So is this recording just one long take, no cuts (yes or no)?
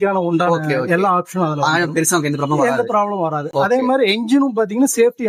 yes